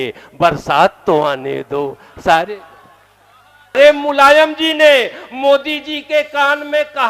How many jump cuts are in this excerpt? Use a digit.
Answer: 1